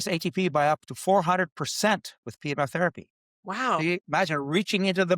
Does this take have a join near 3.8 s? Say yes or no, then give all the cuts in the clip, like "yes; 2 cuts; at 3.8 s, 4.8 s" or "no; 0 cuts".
yes; 1 cut; at 3.8 s